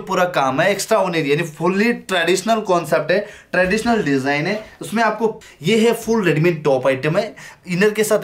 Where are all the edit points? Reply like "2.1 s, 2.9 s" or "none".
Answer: 5.4 s